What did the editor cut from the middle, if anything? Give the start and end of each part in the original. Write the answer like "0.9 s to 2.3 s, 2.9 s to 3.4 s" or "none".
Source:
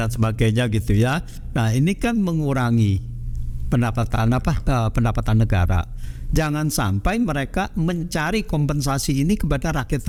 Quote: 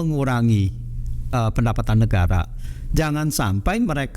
3.6 s to 4.7 s